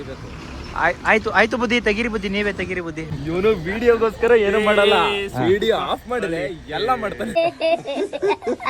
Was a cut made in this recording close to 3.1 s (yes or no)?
yes